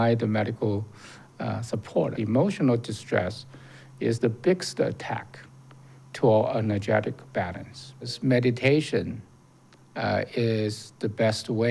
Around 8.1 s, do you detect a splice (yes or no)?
yes